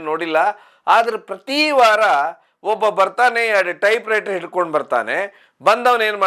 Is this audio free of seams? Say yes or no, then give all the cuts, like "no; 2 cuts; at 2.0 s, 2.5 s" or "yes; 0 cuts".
yes; 0 cuts